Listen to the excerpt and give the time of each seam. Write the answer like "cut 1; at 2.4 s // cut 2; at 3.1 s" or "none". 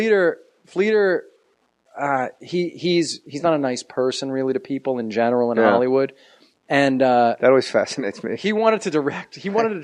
none